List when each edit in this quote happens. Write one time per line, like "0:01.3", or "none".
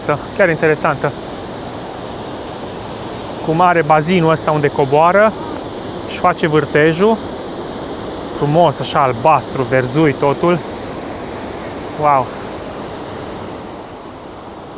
none